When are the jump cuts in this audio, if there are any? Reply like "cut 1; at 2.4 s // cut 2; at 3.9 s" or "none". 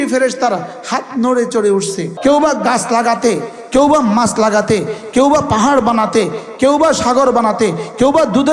cut 1; at 2.1 s